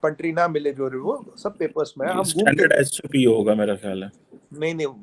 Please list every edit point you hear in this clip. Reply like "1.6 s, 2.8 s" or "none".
none